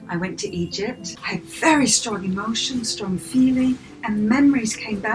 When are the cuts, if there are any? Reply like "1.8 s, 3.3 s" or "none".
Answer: 1.1 s